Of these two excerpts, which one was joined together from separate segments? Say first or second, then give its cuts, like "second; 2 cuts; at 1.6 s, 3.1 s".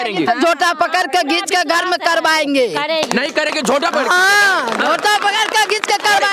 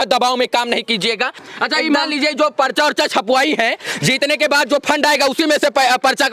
second; 1 cut; at 1.4 s